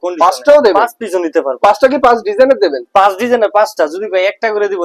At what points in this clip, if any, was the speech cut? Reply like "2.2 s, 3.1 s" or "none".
none

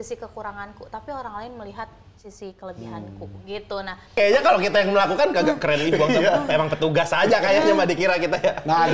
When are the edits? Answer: 4.1 s

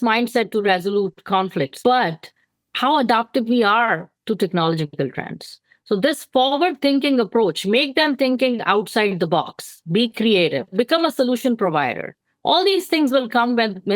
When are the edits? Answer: 1.7 s, 10.7 s

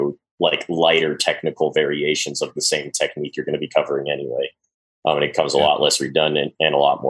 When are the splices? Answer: none

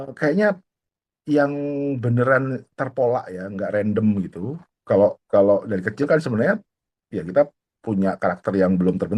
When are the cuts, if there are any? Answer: none

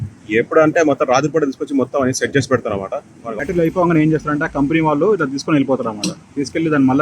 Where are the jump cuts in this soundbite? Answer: 3.2 s

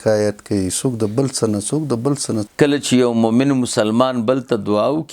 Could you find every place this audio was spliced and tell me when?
2.5 s

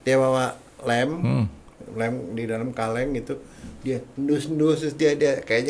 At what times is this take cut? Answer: none

